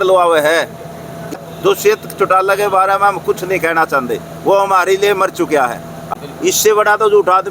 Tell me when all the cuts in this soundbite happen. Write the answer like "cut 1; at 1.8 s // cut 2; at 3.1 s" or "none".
cut 1; at 1.3 s // cut 2; at 6.1 s